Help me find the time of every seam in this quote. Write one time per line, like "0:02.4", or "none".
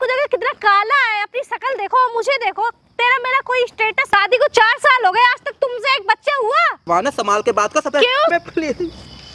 0:04.1
0:08.3